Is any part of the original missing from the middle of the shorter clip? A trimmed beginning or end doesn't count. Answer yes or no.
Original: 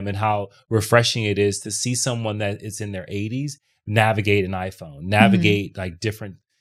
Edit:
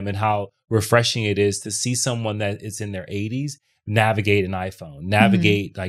no